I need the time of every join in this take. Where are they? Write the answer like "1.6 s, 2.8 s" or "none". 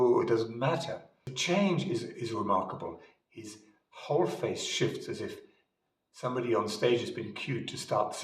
1.3 s